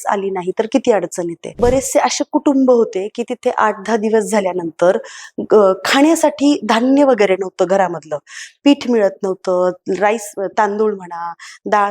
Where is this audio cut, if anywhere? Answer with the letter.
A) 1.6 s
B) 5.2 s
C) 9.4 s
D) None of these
A